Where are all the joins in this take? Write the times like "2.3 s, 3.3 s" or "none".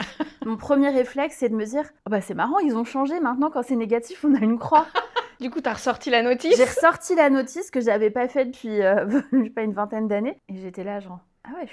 2.0 s, 5.3 s, 10.4 s

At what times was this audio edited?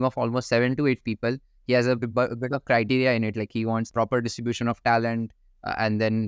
3.9 s

